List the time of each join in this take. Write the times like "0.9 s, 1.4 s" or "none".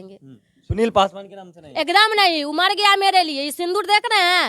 none

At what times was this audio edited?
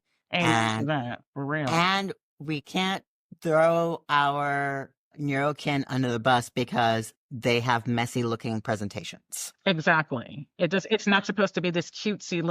none

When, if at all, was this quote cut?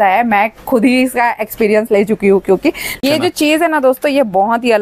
3.0 s

